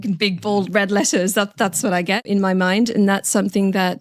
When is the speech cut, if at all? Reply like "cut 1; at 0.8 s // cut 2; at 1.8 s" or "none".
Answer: cut 1; at 2.2 s